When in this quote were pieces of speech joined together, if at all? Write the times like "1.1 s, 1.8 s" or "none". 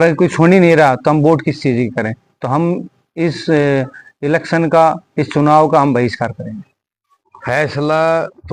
none